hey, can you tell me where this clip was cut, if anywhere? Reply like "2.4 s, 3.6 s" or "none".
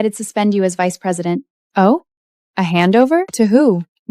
1.6 s, 3.3 s

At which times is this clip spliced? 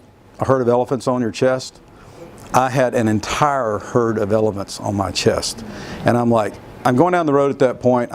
6.8 s

